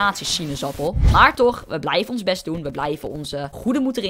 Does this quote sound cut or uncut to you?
cut